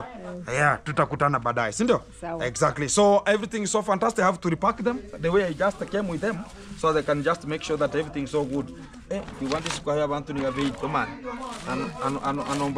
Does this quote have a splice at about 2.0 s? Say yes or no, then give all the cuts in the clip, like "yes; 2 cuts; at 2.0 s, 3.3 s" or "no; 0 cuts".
no; 0 cuts